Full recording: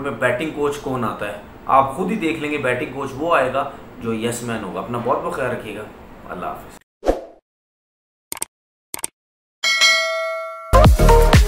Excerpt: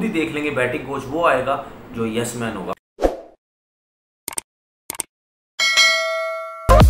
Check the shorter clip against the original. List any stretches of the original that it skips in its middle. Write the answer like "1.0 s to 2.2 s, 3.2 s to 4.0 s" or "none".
4.8 s to 6.8 s